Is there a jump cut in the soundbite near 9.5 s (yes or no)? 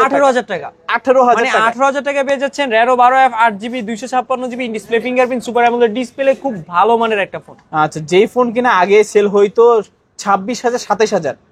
no